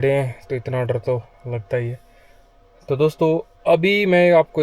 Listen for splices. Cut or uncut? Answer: uncut